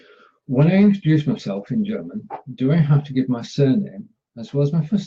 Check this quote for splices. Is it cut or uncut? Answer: cut